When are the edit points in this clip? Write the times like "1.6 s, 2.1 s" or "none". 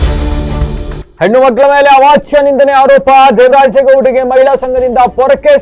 0.9 s